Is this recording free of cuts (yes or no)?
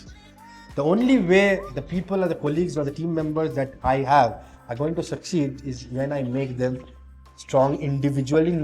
yes